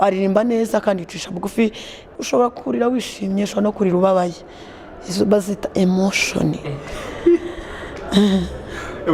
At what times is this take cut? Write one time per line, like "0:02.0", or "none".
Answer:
0:02.1